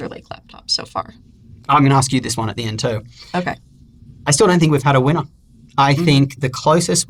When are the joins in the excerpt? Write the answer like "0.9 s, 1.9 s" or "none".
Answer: none